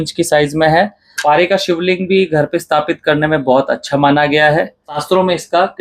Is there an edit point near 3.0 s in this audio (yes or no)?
no